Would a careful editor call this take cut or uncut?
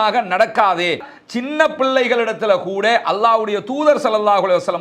cut